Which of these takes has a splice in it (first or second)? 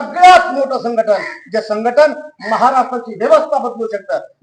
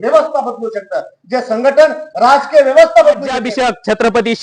second